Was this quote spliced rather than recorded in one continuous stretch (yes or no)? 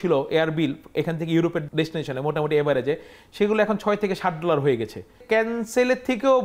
yes